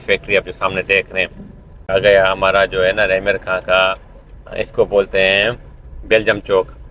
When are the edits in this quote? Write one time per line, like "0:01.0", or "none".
0:01.9